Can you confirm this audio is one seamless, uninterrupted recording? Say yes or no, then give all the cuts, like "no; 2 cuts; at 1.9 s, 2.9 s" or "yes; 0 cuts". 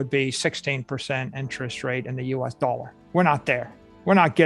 no; 1 cut; at 2.9 s